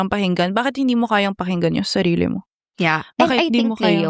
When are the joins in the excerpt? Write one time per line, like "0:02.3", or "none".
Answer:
none